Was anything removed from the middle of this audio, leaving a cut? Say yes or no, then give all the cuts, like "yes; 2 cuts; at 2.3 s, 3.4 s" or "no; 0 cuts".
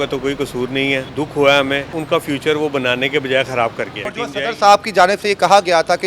yes; 3 cuts; at 1.1 s, 1.9 s, 4.1 s